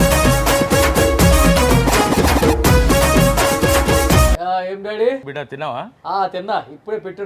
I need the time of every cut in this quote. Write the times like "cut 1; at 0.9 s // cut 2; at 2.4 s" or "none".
cut 1; at 4.3 s // cut 2; at 5.3 s